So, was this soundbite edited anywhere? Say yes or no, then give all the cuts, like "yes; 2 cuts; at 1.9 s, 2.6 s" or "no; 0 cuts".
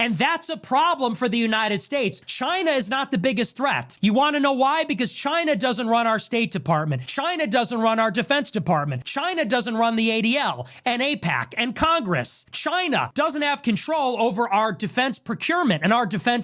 no; 0 cuts